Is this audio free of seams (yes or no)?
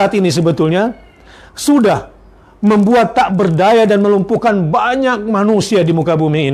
yes